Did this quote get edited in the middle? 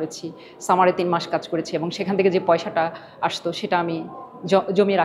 no; 0 cuts

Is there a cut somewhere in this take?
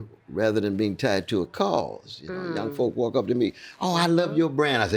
no; 0 cuts

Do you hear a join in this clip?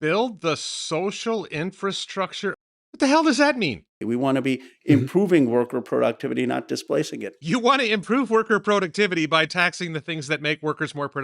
yes; 2 cuts; at 2.6 s, 3.9 s

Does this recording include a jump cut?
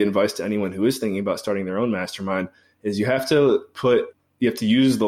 no; 0 cuts

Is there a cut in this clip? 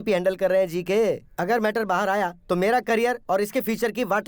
no; 0 cuts

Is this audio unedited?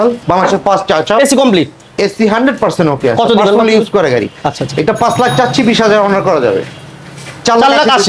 yes; 0 cuts

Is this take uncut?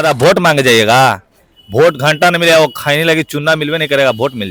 yes; 0 cuts

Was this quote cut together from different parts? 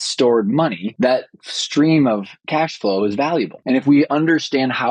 yes; 3 cuts; at 0.9 s, 2.3 s, 3.6 s

